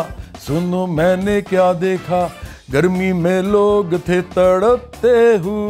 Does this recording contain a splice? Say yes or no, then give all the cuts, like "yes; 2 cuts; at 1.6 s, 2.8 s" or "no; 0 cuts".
no; 0 cuts